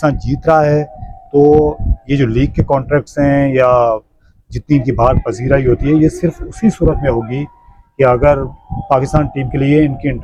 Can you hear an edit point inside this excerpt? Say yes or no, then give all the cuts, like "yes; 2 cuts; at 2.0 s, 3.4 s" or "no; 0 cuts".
no; 0 cuts